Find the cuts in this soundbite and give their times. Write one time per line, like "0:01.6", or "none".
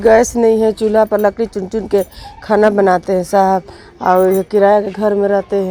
none